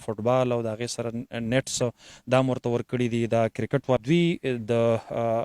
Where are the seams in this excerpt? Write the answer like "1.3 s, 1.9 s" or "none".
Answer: 4.0 s